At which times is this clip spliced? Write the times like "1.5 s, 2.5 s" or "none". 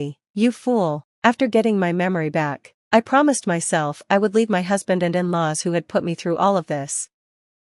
1.1 s